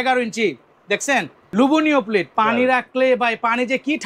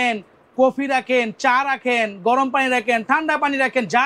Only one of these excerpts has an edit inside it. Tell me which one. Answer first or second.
first